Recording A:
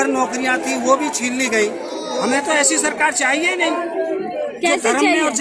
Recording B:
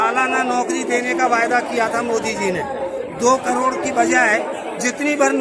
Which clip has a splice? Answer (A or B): A